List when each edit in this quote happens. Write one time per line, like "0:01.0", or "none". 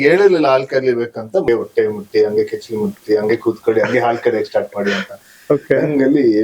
0:01.5